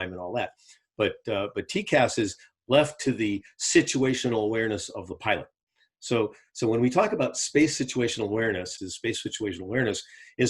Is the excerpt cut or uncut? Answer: cut